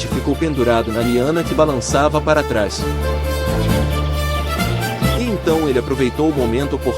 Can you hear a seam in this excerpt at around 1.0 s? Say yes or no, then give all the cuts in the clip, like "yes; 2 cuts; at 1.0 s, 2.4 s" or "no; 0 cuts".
no; 2 cuts; at 2.8 s, 5.2 s